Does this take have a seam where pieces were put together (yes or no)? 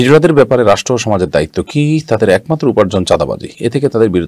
no